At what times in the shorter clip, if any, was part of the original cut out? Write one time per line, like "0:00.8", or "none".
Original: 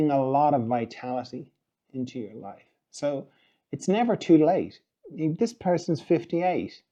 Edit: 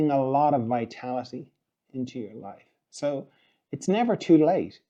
none